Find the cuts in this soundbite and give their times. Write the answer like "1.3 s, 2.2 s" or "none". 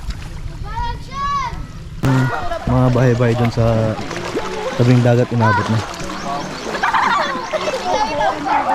2.1 s